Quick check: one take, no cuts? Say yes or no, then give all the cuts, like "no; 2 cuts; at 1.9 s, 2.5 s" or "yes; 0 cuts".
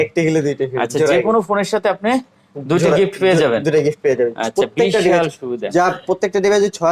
yes; 0 cuts